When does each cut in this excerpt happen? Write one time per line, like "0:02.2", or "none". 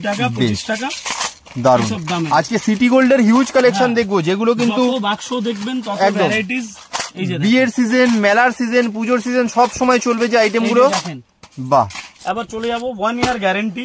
0:12.1